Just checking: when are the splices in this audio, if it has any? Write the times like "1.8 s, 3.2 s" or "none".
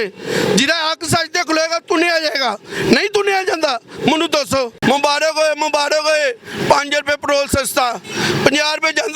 4.8 s